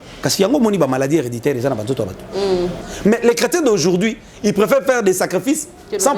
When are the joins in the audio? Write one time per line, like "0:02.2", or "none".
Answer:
0:02.8